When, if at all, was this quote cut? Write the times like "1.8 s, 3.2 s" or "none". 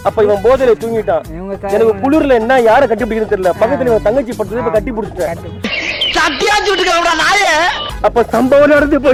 none